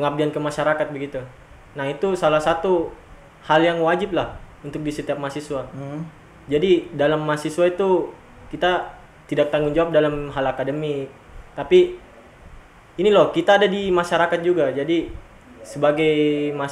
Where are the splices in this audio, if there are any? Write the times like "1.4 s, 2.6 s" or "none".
none